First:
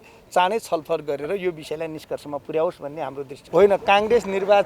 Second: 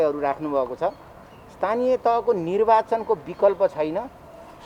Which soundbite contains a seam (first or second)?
first